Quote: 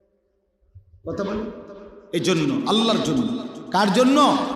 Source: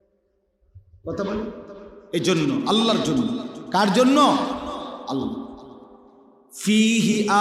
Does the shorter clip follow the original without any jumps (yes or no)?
yes